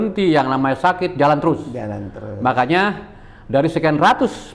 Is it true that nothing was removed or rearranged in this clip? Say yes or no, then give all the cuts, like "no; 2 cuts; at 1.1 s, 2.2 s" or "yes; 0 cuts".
yes; 0 cuts